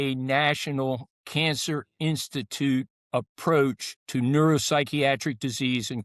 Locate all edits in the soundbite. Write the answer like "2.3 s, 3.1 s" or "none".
1.1 s, 3.0 s